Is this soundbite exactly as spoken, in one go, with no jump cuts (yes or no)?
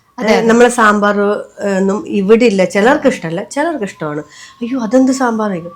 yes